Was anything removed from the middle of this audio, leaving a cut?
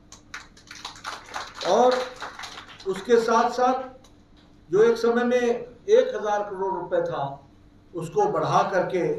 no; 0 cuts

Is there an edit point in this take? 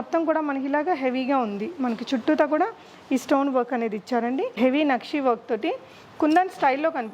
yes; 1 cut; at 4.6 s

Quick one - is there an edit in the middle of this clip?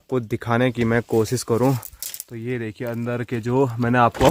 no; 0 cuts

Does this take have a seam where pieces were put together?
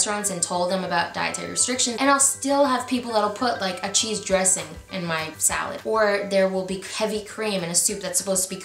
yes; 2 cuts; at 2.0 s, 5.4 s

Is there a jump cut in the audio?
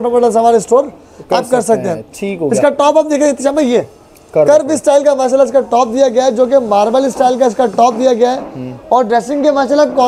no; 0 cuts

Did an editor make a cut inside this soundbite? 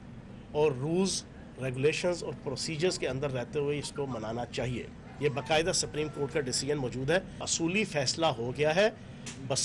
no; 0 cuts

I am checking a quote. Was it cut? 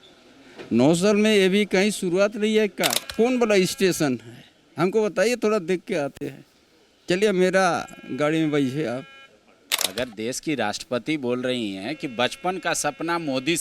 yes; 2 cuts; at 3.0 s, 9.8 s

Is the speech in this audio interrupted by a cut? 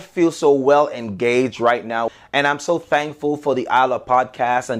yes; 1 cut; at 2.1 s

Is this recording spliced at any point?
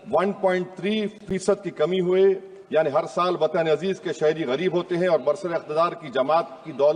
no; 0 cuts

